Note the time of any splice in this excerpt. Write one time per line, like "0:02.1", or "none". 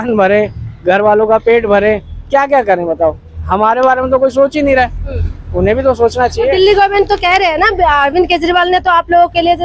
none